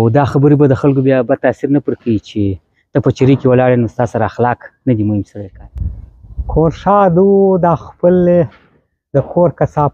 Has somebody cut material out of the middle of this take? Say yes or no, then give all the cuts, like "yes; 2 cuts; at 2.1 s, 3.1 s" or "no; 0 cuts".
yes; 1 cut; at 5.4 s